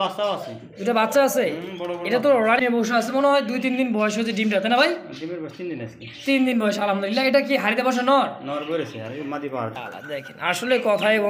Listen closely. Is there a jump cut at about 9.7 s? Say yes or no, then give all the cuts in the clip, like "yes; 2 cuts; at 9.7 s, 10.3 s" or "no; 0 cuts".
yes; 2 cuts; at 3.1 s, 9.7 s